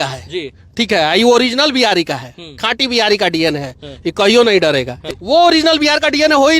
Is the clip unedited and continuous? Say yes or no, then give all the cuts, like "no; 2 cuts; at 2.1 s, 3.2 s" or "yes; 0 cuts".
no; 1 cut; at 5.0 s